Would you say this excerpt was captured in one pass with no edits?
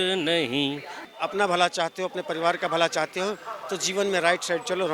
no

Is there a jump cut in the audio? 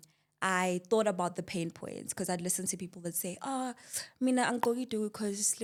no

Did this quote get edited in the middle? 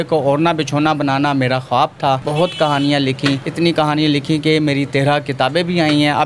yes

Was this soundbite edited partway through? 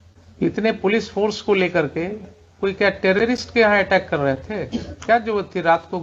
no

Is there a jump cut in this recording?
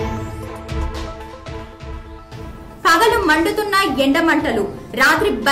no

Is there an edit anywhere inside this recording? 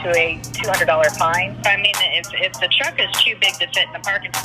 yes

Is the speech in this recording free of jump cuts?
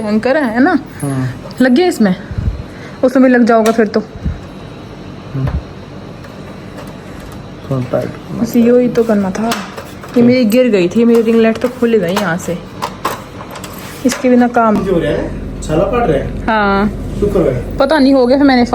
no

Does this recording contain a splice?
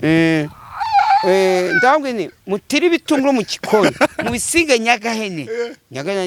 no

